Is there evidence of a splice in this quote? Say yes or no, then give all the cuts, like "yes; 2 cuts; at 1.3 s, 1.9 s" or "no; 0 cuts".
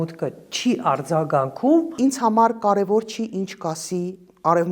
yes; 1 cut; at 1.9 s